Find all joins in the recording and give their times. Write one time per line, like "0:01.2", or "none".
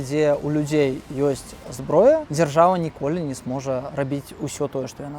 0:02.3
0:03.9